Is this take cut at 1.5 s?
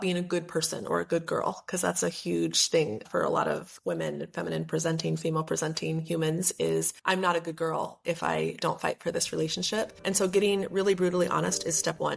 no; 0 cuts

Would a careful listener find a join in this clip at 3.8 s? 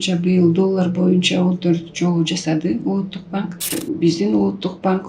yes; 1 cut; at 3.8 s

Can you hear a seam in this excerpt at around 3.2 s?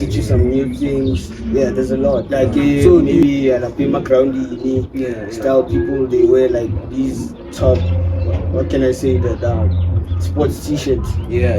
yes; 1 cut; at 3.2 s

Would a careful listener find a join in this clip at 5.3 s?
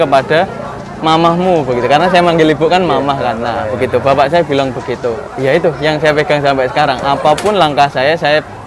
yes; 1 cut; at 5.3 s

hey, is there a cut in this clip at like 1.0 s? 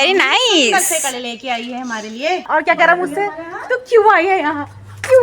no; 1 cut; at 2.5 s

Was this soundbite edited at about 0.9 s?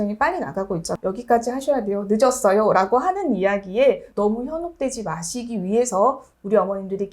yes; 1 cut; at 0.9 s

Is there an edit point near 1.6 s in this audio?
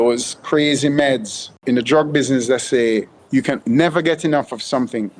yes; 2 cuts; at 1.6 s, 3.5 s

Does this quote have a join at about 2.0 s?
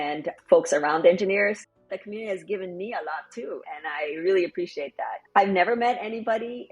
yes; 1 cut; at 2.0 s

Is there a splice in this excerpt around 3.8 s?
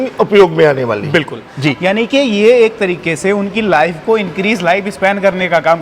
no; 1 cut; at 1.4 s

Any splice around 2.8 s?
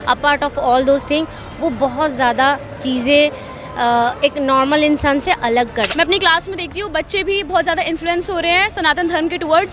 no; 1 cut; at 5.9 s

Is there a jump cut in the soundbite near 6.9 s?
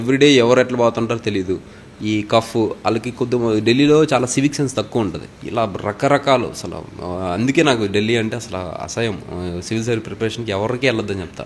no; 1 cut; at 5.4 s

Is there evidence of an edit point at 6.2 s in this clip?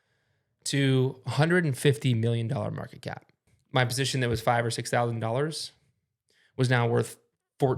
no; 1 cut; at 3.5 s

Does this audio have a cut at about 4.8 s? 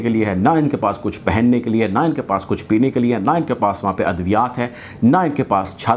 no; 0 cuts

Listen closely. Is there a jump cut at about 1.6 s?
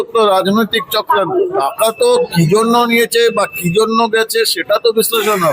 yes; 1 cut; at 1.6 s

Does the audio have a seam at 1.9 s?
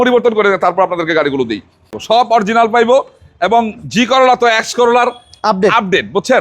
yes; 1 cut; at 1.9 s

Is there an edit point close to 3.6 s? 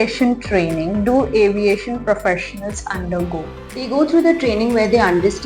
yes; 1 cut; at 3.6 s

